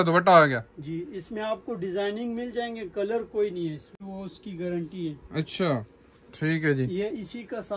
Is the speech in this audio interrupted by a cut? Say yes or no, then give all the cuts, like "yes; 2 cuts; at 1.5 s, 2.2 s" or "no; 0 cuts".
yes; 1 cut; at 4.1 s